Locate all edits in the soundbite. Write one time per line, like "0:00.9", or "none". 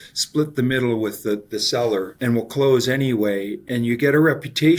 0:02.1
0:03.6